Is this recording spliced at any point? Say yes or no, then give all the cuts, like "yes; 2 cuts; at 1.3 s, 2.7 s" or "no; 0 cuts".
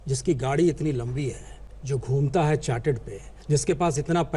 yes; 1 cut; at 3.3 s